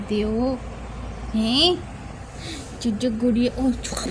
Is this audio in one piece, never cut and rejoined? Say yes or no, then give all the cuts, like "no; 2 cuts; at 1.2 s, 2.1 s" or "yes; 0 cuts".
yes; 0 cuts